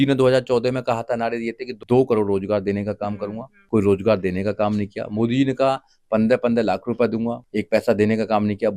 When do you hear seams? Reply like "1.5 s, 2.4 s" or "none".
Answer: 1.7 s, 3.5 s, 7.4 s